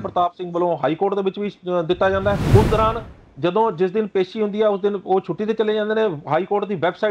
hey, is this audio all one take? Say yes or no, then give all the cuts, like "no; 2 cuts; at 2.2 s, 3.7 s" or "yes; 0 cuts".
no; 1 cut; at 2.4 s